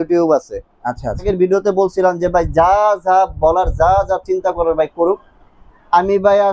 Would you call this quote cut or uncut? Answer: cut